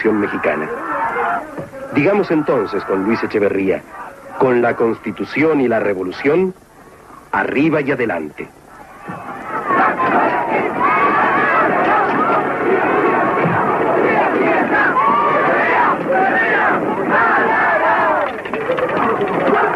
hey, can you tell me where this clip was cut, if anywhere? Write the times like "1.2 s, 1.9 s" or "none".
2.7 s